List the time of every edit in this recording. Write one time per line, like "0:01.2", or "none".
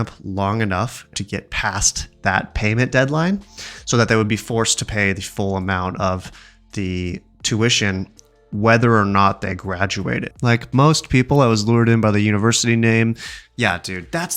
0:01.2
0:10.3